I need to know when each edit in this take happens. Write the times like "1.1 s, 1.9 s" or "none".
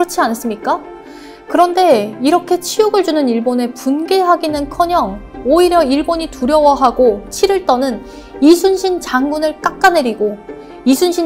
none